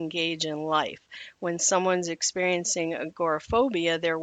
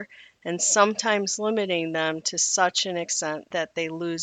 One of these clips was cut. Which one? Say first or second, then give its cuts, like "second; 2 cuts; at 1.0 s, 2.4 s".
second; 1 cut; at 3.2 s